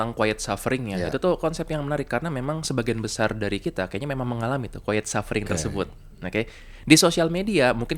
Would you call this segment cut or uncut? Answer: uncut